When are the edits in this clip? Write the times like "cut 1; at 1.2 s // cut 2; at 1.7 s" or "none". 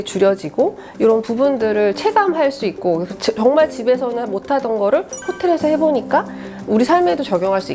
none